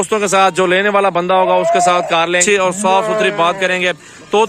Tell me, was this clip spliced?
yes; 1 cut; at 2.4 s

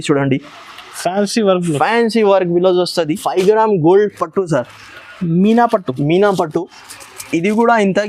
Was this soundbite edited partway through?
yes; 1 cut; at 3.2 s

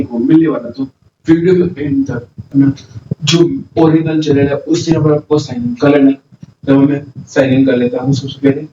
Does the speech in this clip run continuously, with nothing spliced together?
no; 2 cuts; at 2.5 s, 6.3 s

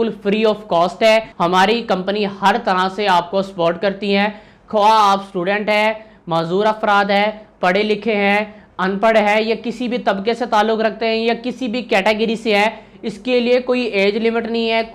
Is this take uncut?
no; 1 cut; at 1.3 s

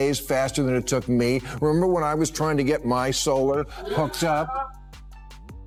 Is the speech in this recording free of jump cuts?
yes; 0 cuts

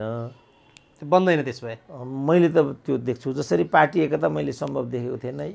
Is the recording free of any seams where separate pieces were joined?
yes; 0 cuts

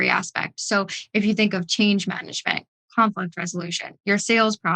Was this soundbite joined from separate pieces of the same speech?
no; 0 cuts

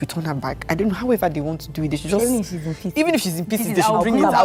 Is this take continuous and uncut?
yes; 0 cuts

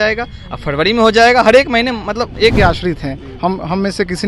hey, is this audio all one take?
no; 1 cut; at 2.6 s

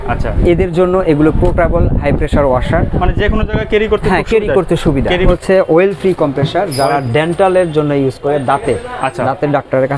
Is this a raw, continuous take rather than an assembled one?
no; 1 cut; at 5.3 s

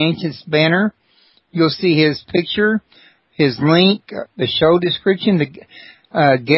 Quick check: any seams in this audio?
no; 0 cuts

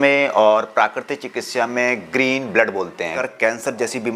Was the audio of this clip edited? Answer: yes; 1 cut; at 3.1 s

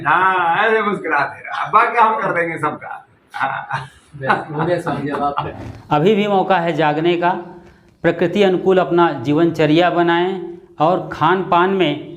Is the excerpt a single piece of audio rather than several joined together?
no; 1 cut; at 5.6 s

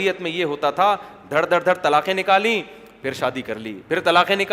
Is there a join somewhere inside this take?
no; 0 cuts

